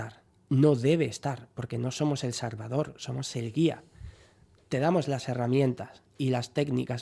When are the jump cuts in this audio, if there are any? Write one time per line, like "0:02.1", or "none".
none